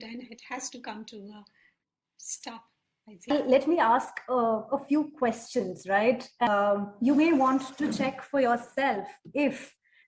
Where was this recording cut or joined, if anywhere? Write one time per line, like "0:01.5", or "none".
0:03.3
0:06.5